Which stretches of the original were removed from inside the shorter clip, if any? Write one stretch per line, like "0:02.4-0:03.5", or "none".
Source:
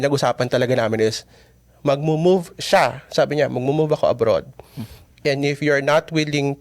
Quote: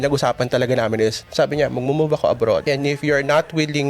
0:01.2-0:03.0
0:04.4-0:05.2

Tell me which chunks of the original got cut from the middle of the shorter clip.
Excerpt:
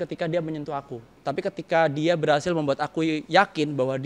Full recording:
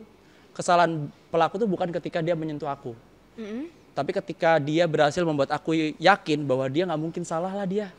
0:03.0-0:03.8

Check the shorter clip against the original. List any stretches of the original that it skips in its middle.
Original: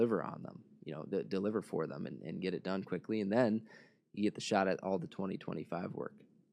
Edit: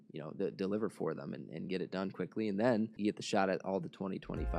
0:03.7-0:04.1

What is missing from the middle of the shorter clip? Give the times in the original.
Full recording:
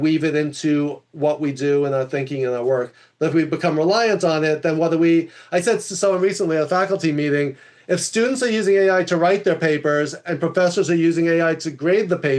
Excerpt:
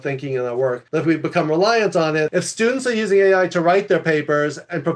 0:02.9-0:03.1
0:04.6-0:07.9

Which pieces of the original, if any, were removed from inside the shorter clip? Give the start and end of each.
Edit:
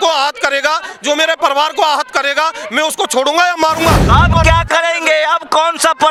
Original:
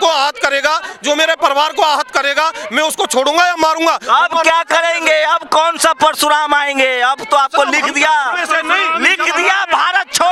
none

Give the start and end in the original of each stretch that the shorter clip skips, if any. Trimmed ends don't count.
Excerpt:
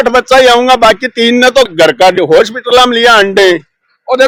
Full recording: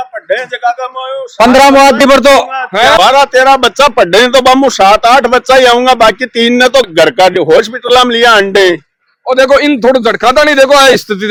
none

